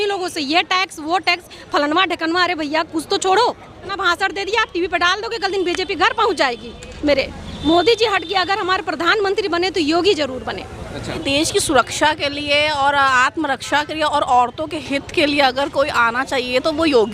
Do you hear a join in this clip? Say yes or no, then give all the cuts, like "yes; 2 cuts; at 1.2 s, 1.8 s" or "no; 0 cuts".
yes; 3 cuts; at 3.9 s, 7.1 s, 11.2 s